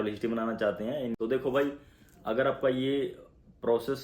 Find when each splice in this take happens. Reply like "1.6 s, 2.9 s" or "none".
1.2 s